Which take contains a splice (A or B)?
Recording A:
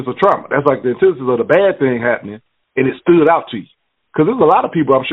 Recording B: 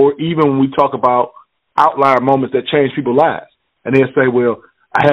B